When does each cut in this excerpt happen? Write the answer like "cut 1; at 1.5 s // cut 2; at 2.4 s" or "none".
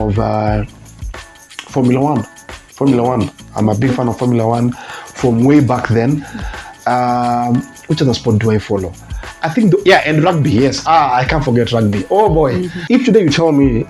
cut 1; at 12.7 s